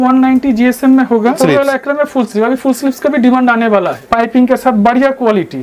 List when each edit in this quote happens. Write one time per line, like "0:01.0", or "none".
0:01.4
0:04.0